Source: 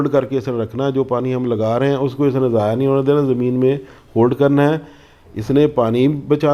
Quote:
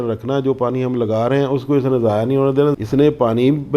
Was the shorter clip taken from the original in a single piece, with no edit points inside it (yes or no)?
no